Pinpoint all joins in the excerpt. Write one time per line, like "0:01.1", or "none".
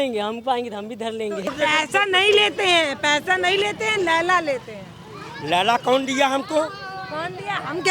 0:01.5